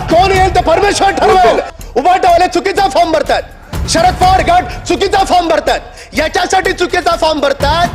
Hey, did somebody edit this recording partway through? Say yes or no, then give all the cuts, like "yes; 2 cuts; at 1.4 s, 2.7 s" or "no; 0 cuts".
yes; 1 cut; at 1.8 s